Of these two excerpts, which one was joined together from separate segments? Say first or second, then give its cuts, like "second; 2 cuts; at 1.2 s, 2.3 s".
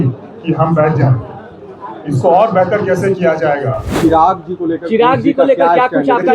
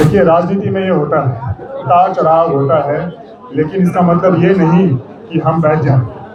first; 1 cut; at 3.9 s